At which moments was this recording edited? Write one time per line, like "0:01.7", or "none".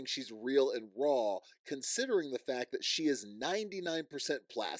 none